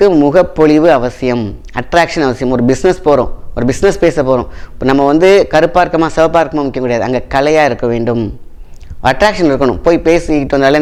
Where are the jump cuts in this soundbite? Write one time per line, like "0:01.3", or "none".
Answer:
none